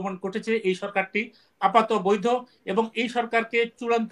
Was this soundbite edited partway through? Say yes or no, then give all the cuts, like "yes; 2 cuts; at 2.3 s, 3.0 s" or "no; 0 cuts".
no; 0 cuts